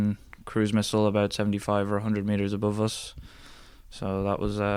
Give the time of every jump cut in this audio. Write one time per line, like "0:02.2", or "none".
none